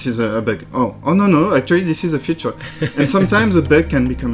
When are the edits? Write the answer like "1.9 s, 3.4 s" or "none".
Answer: none